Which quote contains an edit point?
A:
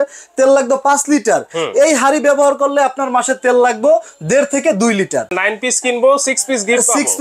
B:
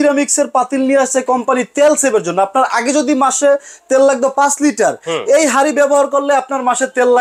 A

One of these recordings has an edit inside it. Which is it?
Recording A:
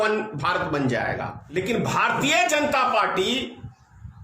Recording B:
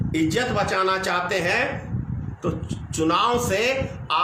A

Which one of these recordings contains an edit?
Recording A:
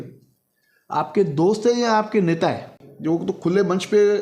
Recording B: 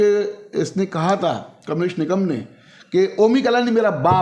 A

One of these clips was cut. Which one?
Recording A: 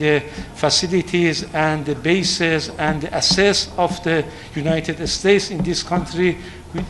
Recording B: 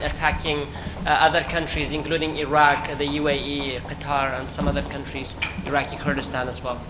A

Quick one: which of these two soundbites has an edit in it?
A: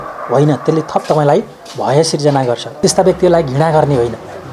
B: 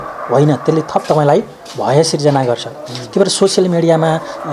A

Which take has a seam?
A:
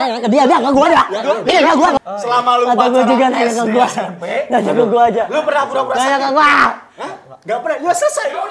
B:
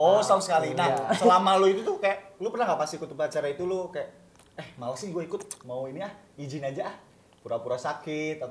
A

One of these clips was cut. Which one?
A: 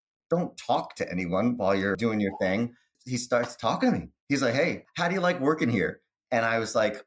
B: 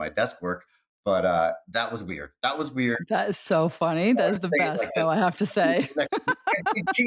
A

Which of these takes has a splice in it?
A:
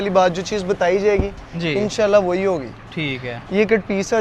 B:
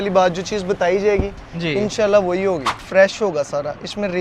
B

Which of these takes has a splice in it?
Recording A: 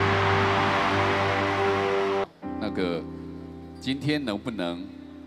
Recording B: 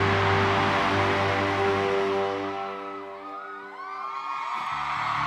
A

